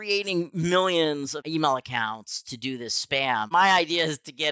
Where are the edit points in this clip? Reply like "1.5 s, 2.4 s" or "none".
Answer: 1.4 s, 3.5 s